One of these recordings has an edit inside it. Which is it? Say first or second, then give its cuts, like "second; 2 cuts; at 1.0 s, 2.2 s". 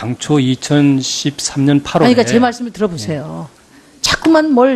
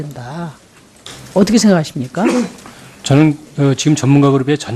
second; 1 cut; at 2.3 s